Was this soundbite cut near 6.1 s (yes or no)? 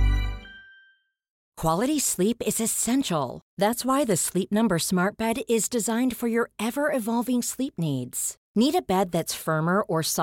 no